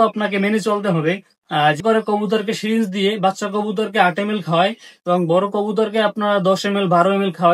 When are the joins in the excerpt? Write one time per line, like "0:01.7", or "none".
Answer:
0:01.8

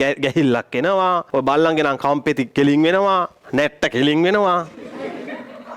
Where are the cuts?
0:01.2
0:03.4

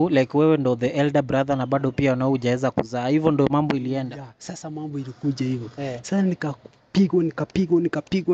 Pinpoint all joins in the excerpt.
none

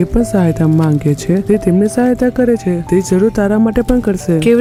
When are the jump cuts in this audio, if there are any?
none

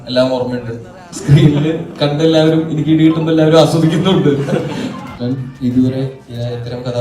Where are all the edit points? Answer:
0:01.1
0:05.1

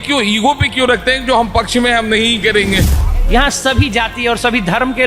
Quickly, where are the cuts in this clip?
0:02.9

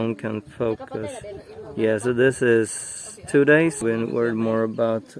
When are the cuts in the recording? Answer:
0:03.8

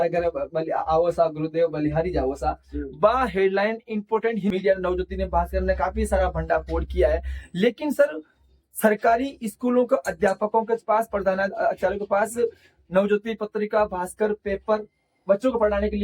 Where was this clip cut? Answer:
0:04.5

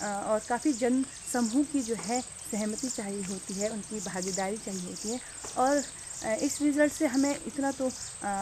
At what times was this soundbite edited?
none

